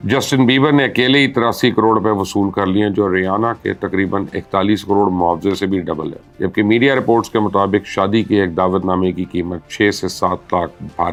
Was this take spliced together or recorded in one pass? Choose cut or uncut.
uncut